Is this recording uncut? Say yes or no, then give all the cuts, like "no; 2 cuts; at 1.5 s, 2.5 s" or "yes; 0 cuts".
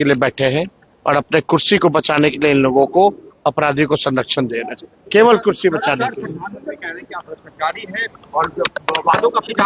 yes; 0 cuts